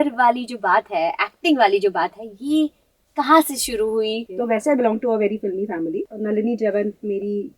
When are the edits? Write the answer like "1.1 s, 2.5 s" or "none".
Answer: 4.3 s, 6.1 s